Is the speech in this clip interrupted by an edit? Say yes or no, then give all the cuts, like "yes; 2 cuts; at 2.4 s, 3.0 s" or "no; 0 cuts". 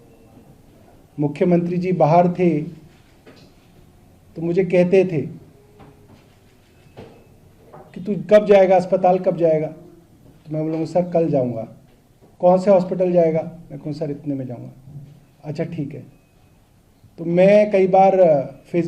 no; 0 cuts